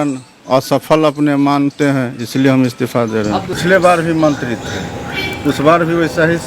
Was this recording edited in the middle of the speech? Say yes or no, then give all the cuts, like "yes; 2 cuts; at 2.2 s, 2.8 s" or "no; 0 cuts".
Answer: yes; 1 cut; at 3.4 s